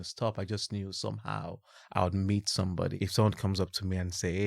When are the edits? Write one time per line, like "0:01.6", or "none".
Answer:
0:03.0